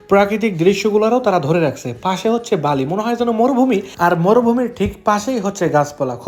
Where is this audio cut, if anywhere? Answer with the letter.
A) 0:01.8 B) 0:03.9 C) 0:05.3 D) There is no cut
D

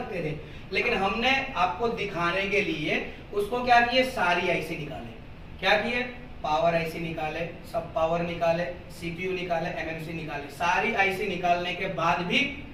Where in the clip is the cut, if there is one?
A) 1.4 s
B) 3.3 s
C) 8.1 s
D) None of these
D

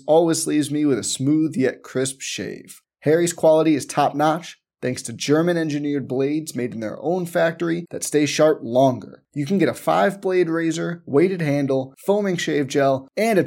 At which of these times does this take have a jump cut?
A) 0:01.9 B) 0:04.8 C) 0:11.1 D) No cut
D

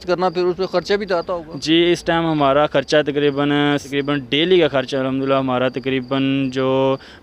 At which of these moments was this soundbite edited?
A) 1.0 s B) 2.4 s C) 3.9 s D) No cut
C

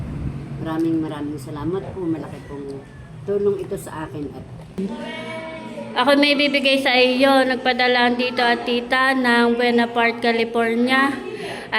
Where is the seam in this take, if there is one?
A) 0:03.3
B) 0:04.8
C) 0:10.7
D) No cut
B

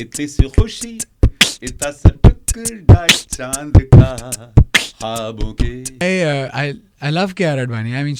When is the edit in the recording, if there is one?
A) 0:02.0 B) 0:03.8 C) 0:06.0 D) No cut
C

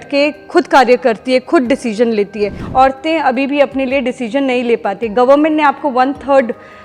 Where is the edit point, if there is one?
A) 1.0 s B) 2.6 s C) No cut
B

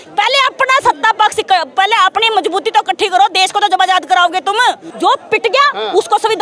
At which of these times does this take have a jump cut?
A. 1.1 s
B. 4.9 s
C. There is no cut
B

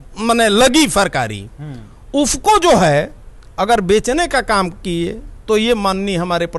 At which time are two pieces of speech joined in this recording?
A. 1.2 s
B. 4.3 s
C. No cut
C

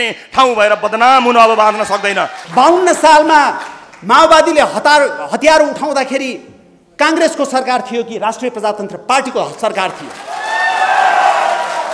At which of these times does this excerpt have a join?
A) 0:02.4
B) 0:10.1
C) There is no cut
A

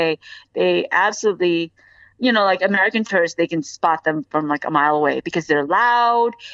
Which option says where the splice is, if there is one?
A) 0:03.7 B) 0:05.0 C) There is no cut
C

